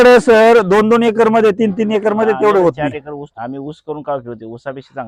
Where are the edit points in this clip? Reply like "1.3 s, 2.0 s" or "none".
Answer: none